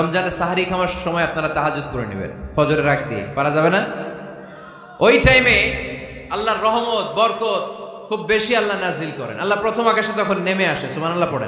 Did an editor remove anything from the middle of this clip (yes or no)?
yes